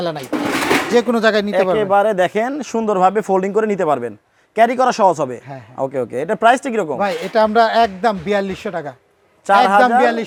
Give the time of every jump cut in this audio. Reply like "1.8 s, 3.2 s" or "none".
none

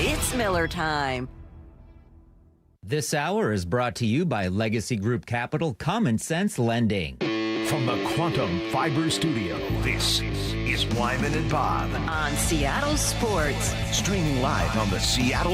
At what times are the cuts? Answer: 2.7 s, 7.1 s

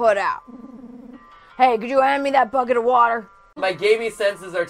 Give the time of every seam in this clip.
3.5 s

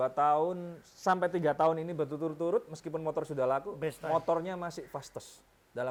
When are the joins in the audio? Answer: none

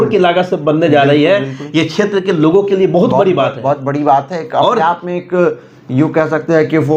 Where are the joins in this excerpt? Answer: none

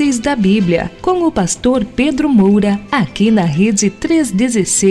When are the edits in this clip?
2.8 s

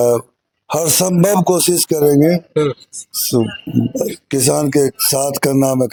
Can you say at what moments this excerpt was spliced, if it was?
none

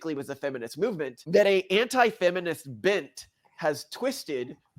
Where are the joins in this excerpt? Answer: 1.2 s

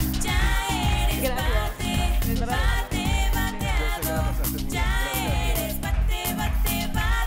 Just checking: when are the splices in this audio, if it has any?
4.6 s

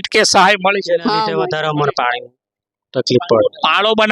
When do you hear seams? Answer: 1.4 s

